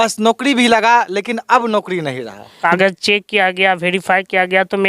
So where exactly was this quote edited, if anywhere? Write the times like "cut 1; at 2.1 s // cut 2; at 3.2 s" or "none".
cut 1; at 2.5 s